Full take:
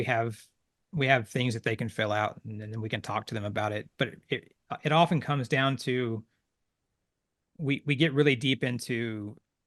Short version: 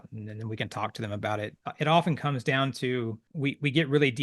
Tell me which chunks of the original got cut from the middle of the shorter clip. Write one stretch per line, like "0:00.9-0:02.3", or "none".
0:03.9-0:04.6
0:06.3-0:07.5